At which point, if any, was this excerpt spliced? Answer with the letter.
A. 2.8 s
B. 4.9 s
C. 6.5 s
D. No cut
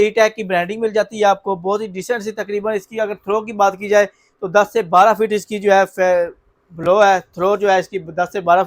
D